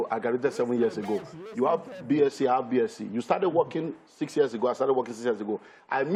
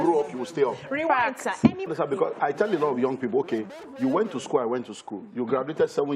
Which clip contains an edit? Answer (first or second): second